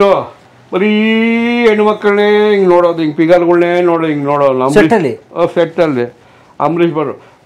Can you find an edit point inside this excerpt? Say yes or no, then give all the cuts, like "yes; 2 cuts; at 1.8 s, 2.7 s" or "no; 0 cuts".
no; 0 cuts